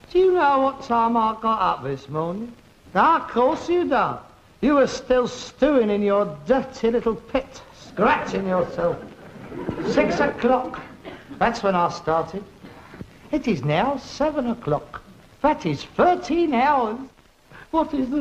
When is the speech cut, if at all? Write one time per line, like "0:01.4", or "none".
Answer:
0:15.9